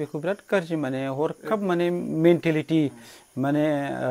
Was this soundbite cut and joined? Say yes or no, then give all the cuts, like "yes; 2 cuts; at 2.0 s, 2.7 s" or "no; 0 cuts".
no; 0 cuts